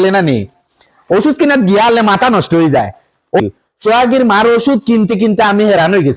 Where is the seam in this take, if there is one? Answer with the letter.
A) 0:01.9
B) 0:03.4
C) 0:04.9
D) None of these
B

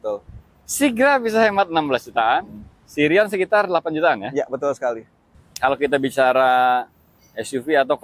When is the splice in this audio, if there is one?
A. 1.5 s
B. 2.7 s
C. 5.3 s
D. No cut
C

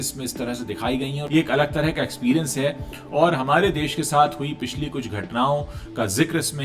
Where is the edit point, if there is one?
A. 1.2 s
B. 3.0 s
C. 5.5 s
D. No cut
A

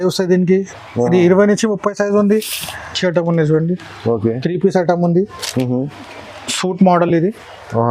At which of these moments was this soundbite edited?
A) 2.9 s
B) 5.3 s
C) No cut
A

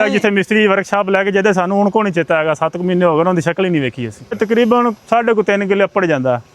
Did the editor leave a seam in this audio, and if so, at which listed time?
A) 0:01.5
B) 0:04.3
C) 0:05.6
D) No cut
B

